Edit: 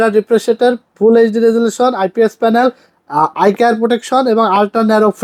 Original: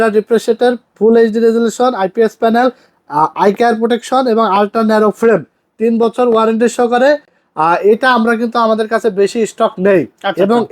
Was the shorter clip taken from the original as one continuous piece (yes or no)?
yes